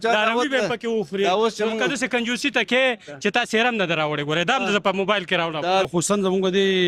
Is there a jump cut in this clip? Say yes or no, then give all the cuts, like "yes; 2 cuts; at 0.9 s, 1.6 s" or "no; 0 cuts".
yes; 1 cut; at 5.9 s